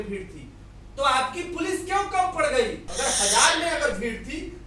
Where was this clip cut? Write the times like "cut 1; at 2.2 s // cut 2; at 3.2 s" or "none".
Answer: cut 1; at 2.8 s